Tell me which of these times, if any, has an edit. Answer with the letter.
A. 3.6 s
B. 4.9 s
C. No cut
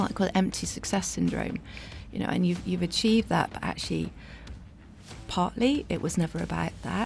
C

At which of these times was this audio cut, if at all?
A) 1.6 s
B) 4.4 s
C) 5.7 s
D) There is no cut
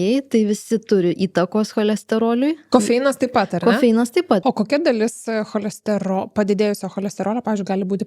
B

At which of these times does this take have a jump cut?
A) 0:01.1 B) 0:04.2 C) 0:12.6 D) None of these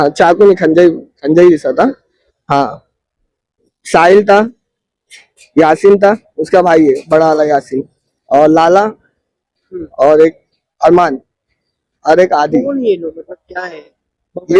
D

